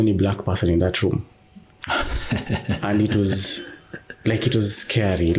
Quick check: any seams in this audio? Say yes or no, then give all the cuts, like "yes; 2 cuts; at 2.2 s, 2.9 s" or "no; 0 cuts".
no; 0 cuts